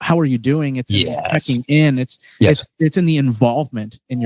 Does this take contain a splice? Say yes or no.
no